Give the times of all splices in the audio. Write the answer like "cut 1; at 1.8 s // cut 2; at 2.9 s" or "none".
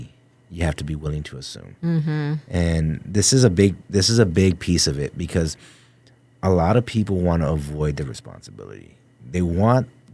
none